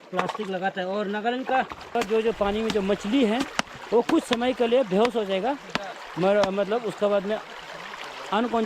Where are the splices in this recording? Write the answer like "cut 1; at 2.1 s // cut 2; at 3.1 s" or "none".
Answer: cut 1; at 1.9 s